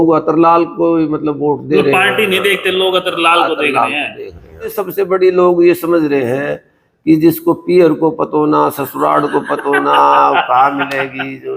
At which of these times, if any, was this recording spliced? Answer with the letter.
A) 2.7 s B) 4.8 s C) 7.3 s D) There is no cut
B